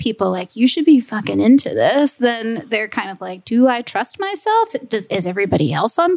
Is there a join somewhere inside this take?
no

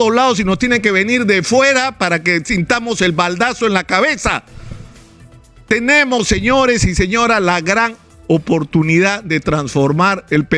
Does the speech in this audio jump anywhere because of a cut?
no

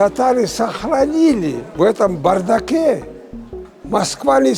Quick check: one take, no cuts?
no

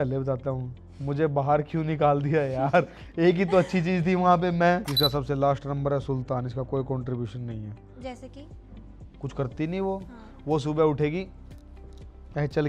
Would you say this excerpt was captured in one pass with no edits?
no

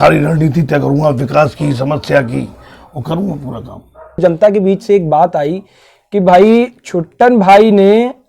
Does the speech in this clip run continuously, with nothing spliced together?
no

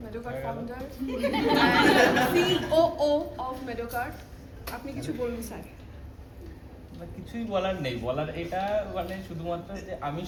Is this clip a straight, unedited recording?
yes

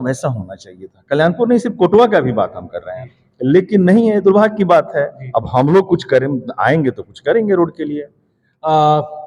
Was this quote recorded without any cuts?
yes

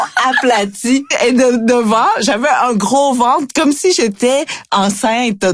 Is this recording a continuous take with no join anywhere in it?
yes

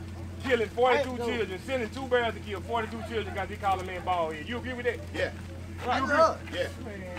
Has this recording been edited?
no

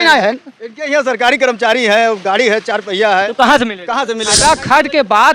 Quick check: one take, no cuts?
no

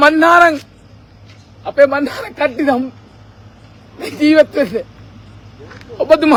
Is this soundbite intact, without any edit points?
yes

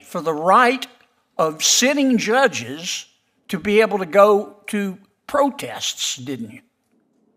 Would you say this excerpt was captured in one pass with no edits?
yes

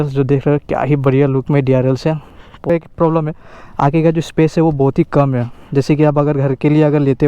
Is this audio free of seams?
no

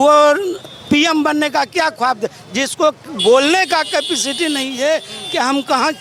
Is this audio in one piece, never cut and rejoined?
yes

